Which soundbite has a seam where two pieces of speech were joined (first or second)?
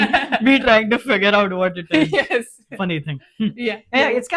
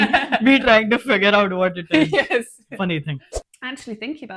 second